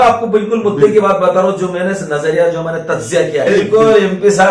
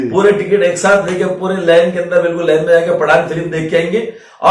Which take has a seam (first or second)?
first